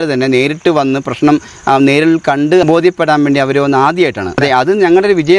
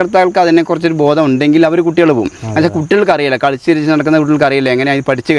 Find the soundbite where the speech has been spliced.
first; 2 cuts; at 2.6 s, 4.4 s

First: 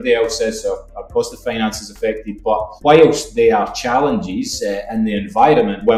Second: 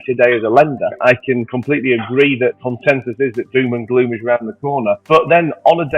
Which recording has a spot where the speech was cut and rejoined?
second; 2 cuts; at 1.0 s, 2.6 s

